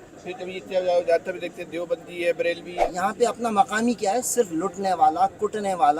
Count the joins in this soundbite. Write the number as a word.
one